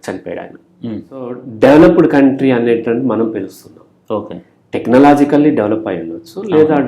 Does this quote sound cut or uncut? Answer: cut